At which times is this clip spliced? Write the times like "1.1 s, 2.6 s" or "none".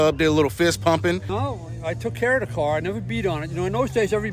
1.3 s